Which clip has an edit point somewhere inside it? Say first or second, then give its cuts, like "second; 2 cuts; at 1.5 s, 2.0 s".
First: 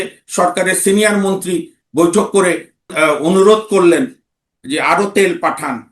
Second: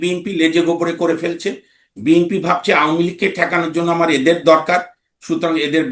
first; 1 cut; at 2.9 s